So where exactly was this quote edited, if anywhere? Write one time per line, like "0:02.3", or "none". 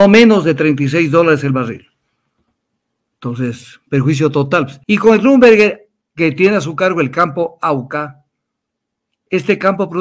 0:04.8